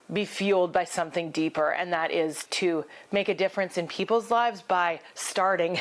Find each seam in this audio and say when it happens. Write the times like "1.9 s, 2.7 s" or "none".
2.5 s